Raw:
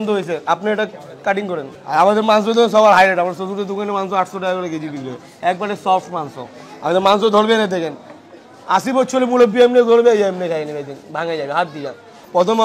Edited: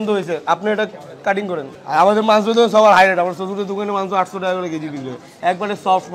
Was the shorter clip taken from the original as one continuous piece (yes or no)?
yes